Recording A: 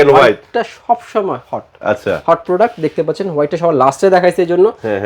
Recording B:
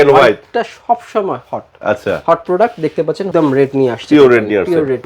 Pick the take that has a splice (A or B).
B